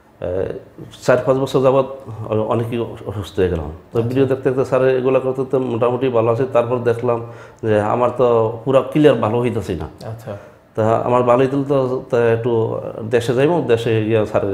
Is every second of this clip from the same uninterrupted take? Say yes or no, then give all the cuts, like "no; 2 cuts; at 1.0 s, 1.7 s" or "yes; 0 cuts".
yes; 0 cuts